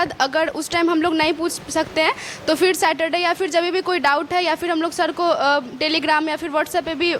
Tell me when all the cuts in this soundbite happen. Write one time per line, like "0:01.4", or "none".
none